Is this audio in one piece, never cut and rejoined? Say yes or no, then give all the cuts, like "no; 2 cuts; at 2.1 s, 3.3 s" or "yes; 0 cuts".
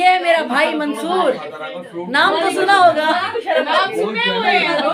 yes; 0 cuts